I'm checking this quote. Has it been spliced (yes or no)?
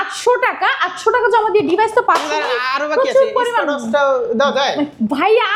no